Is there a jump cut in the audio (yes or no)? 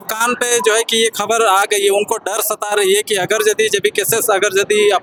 no